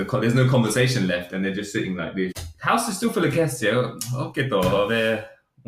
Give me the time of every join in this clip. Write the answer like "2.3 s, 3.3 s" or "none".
2.4 s

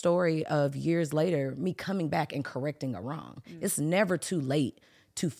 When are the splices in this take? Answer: none

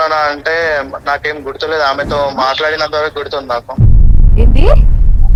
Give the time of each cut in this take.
none

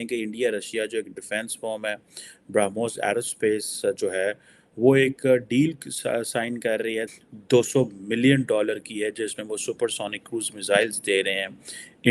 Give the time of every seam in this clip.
7.1 s

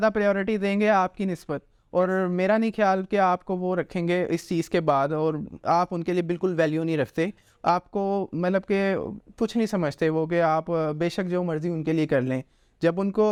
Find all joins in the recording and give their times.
none

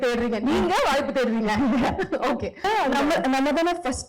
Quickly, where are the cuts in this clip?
2.6 s

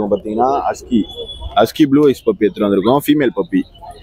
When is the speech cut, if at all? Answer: none

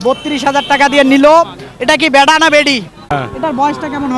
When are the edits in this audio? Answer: 3.1 s

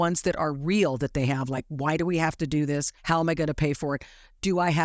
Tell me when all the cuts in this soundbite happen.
2.9 s

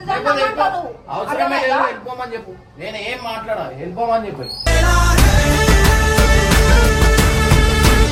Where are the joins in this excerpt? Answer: none

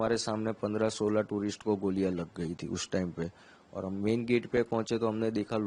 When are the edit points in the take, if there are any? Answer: none

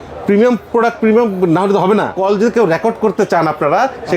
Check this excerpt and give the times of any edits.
2.1 s

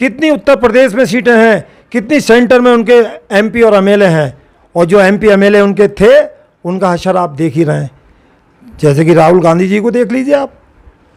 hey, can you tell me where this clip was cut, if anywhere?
none

